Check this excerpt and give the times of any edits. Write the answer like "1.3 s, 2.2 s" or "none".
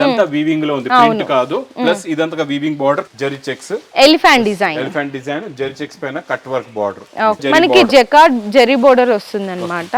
3.1 s, 7.4 s